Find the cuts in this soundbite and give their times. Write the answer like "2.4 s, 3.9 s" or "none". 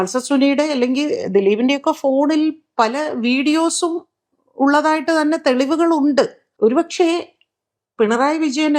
6.4 s